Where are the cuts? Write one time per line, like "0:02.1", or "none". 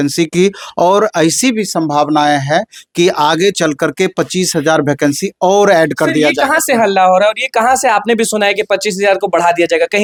none